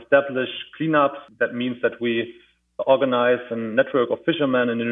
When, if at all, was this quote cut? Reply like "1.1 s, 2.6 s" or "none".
1.2 s